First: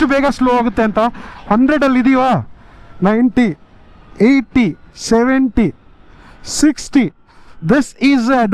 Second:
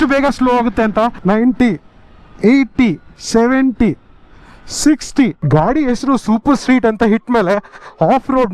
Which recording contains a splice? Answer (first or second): second